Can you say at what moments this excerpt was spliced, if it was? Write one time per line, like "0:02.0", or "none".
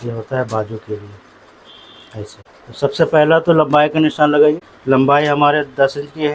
0:02.5
0:04.6